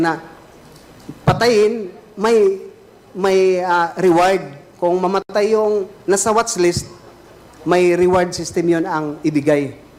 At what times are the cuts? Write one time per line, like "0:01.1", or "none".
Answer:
none